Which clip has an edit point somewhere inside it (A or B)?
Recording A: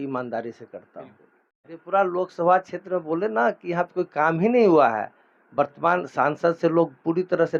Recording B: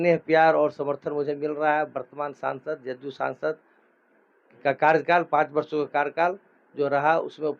A